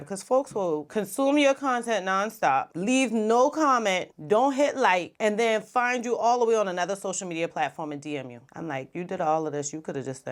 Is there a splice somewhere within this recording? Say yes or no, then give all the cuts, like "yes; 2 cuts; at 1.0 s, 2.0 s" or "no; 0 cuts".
no; 0 cuts